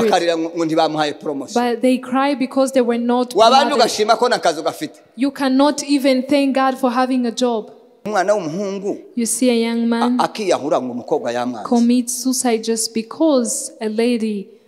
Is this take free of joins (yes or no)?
no